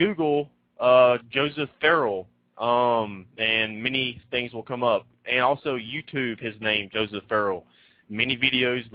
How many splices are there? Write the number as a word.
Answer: zero